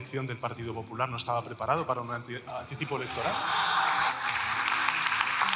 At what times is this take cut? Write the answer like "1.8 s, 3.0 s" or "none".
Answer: none